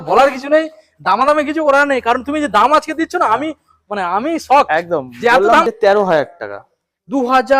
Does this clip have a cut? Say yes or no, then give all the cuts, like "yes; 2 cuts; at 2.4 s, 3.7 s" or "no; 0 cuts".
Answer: yes; 1 cut; at 5.7 s